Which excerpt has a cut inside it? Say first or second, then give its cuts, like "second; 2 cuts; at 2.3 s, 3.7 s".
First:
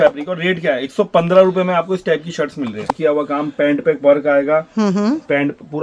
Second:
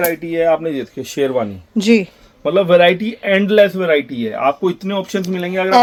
first; 1 cut; at 2.9 s